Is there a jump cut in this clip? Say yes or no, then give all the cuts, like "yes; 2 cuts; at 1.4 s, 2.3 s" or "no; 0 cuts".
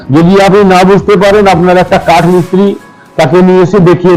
no; 0 cuts